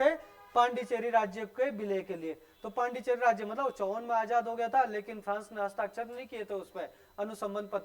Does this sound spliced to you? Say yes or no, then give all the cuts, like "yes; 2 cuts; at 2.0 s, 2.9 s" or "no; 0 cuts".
no; 0 cuts